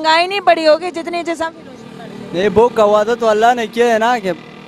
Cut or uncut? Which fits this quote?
uncut